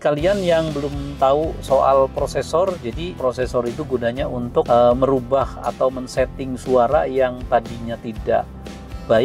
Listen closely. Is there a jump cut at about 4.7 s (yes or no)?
yes